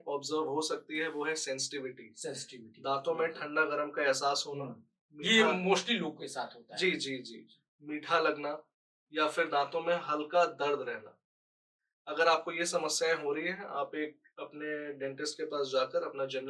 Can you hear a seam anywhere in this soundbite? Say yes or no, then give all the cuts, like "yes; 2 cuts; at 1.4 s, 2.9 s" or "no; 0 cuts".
no; 0 cuts